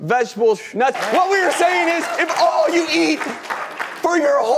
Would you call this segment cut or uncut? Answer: cut